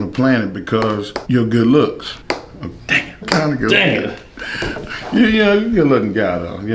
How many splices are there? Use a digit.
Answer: 3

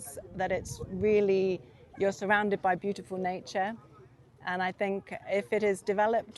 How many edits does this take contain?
0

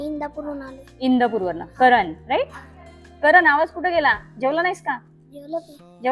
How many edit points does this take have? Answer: 0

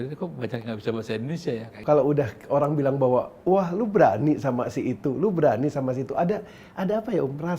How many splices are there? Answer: 1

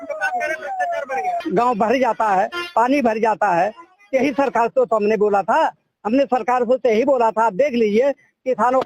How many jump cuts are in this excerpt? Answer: 1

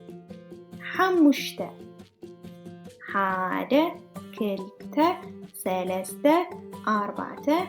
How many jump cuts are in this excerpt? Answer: 1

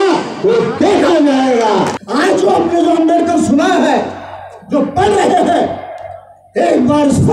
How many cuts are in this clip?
1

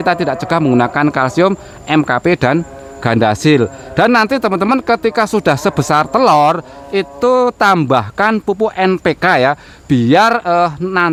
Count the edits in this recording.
0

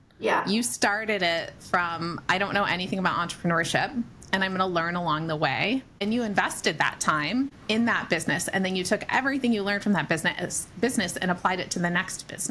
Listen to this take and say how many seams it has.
2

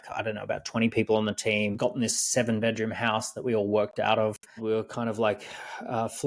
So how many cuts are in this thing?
2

